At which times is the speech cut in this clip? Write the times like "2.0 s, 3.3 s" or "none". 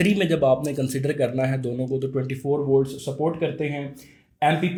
none

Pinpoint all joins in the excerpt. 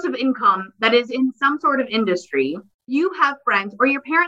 2.9 s

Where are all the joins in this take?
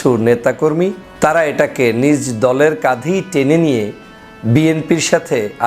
1.0 s

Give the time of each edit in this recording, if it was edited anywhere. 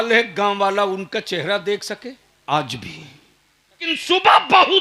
2.3 s, 3.9 s

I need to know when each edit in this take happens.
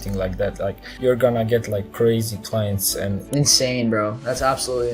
0.9 s, 3.2 s

